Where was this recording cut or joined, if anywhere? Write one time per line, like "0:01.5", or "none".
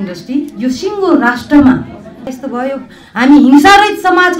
0:02.3